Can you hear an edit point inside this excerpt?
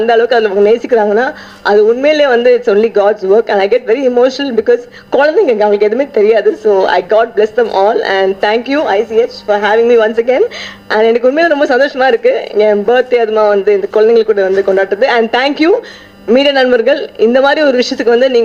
no; 0 cuts

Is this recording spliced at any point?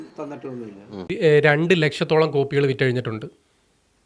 yes; 1 cut; at 1.1 s

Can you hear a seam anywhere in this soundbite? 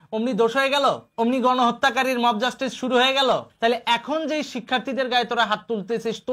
yes; 2 cuts; at 1.1 s, 3.5 s

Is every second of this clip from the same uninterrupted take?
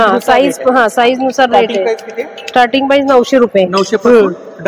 yes; 0 cuts

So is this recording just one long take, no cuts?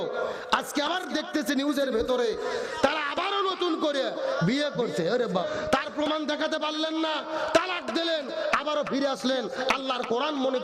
no; 1 cut; at 5.4 s

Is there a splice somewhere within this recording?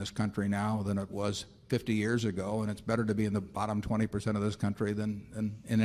no; 0 cuts

